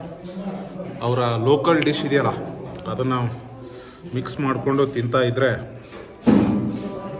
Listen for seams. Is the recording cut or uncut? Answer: uncut